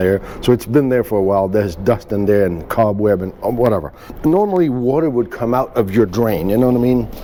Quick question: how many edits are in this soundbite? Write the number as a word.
zero